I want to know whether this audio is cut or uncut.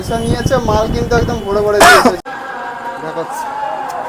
cut